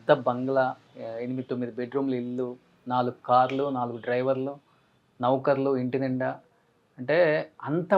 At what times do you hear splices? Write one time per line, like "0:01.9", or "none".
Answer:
0:00.9